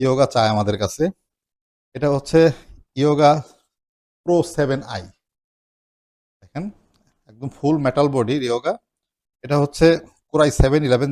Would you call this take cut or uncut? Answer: uncut